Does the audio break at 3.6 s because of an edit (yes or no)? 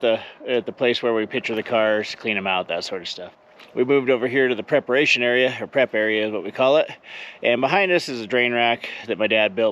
yes